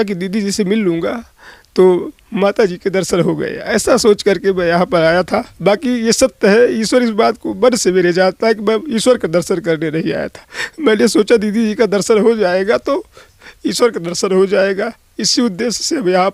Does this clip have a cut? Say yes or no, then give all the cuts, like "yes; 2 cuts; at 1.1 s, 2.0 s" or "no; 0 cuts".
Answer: no; 0 cuts